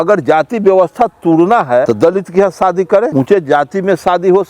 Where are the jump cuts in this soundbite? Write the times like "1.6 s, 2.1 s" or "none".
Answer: 1.9 s, 3.1 s